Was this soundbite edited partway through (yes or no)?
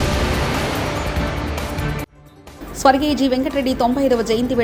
no